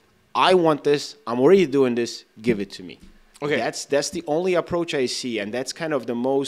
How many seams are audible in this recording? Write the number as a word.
zero